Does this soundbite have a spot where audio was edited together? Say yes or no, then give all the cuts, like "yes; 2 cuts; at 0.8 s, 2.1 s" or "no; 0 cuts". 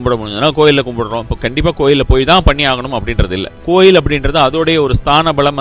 yes; 2 cuts; at 1.3 s, 3.6 s